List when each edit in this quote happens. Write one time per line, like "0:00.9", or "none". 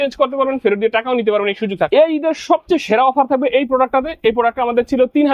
0:01.9